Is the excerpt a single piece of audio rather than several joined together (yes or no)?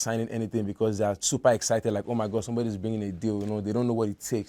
yes